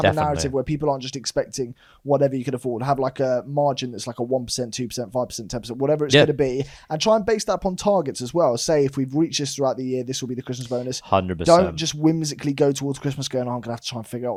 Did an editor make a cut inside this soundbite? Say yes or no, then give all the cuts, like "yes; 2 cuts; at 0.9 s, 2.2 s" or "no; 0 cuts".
no; 0 cuts